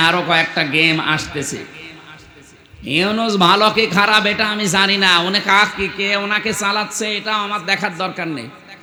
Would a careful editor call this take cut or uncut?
uncut